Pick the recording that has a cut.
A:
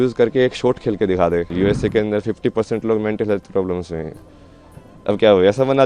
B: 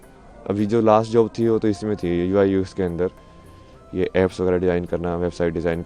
A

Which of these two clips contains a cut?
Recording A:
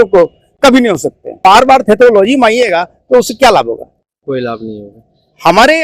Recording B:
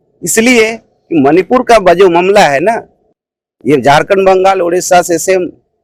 A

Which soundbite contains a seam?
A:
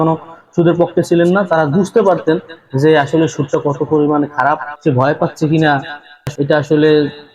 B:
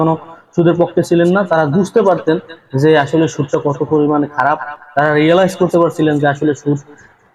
A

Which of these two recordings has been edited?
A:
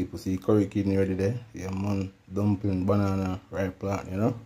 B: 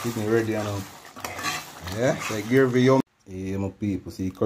B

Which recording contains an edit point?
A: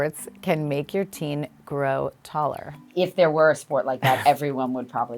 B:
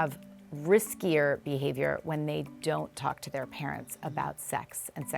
A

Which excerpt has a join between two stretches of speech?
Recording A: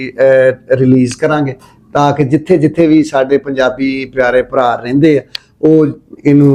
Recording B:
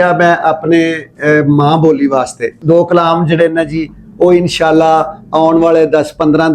B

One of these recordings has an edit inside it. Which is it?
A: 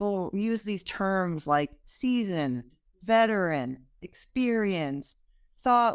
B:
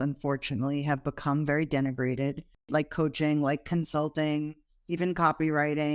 B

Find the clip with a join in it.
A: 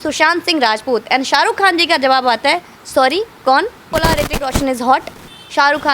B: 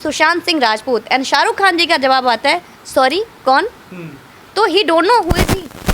A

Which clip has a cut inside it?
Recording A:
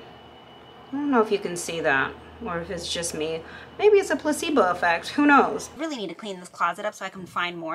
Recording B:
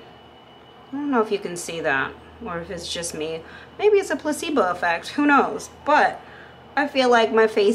A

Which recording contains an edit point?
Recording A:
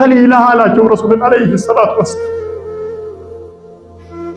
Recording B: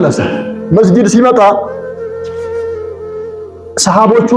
B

